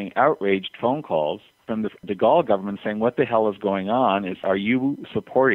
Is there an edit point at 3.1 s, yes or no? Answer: no